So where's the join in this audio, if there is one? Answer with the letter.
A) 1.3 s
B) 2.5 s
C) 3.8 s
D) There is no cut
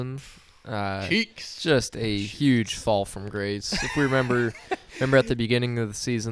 D